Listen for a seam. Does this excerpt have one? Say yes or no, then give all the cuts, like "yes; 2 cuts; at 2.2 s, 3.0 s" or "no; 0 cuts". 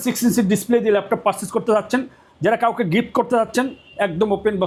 no; 0 cuts